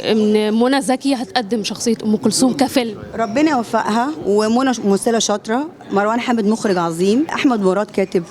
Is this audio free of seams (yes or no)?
yes